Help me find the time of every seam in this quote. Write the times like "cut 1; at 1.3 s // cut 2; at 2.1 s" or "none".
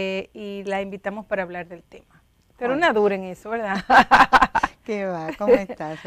cut 1; at 3.8 s